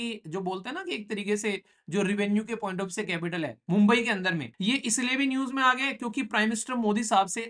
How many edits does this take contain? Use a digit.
1